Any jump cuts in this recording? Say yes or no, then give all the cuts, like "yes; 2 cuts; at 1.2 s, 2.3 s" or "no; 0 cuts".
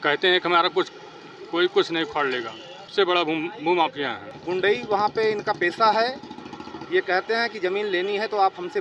yes; 2 cuts; at 2.9 s, 4.3 s